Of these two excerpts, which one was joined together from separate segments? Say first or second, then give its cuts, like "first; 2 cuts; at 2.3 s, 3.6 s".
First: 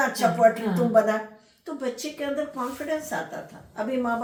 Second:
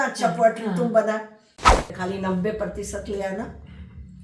second; 1 cut; at 1.8 s